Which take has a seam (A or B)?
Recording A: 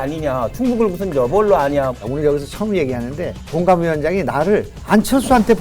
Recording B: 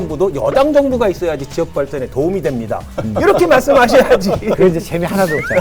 A